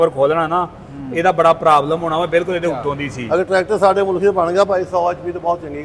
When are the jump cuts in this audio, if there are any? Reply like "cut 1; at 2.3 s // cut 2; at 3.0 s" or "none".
cut 1; at 3.1 s